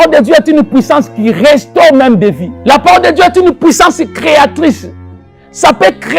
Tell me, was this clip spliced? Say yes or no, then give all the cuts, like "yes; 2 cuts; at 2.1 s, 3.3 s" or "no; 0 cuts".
yes; 1 cut; at 2.5 s